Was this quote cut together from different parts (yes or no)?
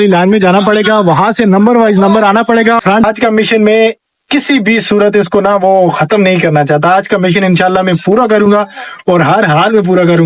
yes